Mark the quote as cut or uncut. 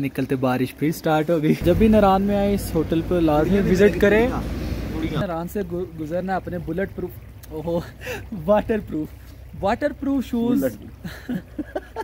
cut